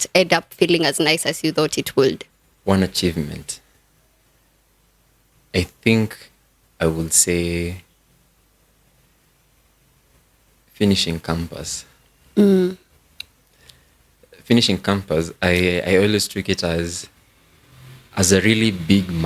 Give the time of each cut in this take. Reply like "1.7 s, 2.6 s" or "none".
none

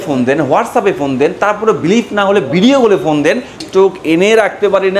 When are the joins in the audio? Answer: 3.6 s

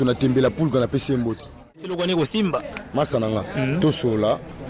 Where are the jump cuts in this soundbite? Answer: 1.8 s

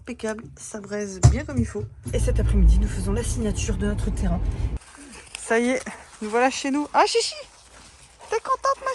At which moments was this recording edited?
2.1 s, 4.6 s

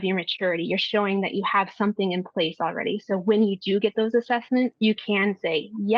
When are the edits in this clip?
4.7 s

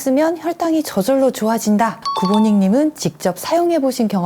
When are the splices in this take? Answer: 2.0 s

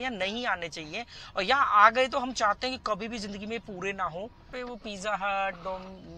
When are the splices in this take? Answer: 4.5 s

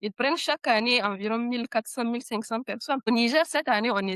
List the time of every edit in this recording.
3.1 s

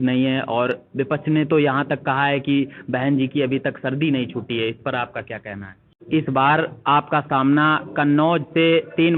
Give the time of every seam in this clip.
6.0 s

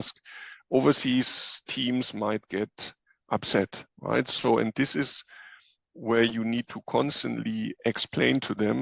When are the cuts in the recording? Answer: none

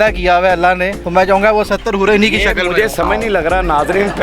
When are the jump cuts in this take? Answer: 0.9 s

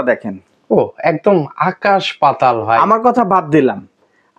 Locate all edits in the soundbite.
none

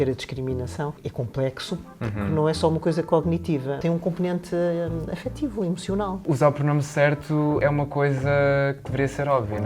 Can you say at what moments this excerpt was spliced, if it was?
1.0 s, 3.8 s, 6.3 s, 7.6 s

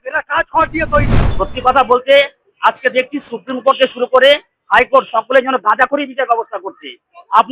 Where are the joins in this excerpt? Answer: 1.2 s

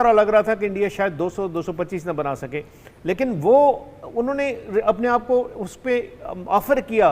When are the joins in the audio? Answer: none

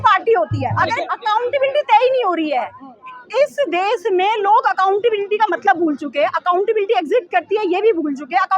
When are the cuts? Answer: 1.1 s

